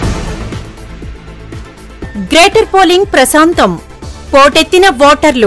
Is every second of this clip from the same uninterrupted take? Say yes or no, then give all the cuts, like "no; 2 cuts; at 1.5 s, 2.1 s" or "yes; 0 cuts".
no; 1 cut; at 1.4 s